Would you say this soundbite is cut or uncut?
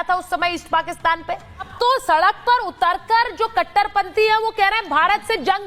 cut